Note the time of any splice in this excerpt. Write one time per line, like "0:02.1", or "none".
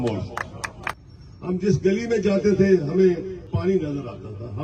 0:01.0
0:03.4

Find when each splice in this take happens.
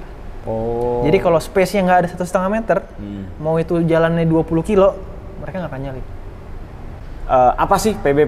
0:07.1

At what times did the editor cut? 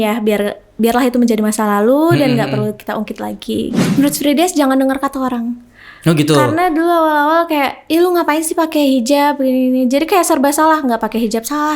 0:03.8

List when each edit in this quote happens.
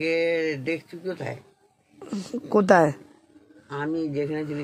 none

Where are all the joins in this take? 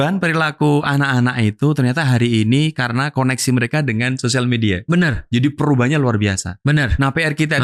none

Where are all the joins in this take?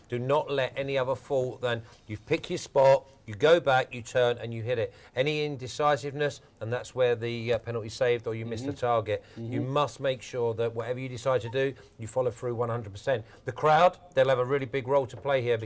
0:08.8

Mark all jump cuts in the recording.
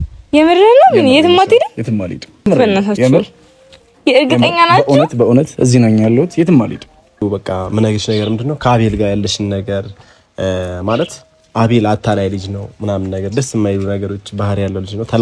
0:02.5
0:07.2

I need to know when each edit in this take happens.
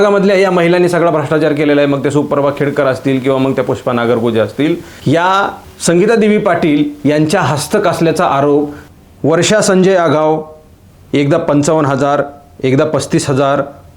0:05.7
0:08.8

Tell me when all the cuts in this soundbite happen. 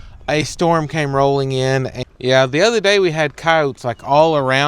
0:02.0

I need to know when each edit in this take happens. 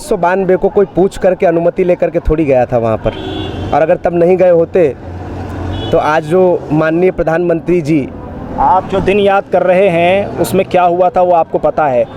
none

